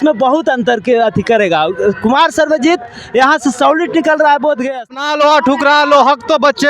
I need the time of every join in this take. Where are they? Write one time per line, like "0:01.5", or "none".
0:05.0